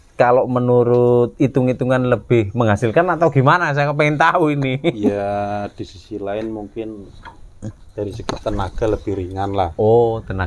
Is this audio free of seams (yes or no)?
yes